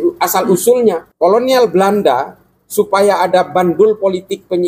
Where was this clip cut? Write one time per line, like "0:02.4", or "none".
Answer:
0:01.1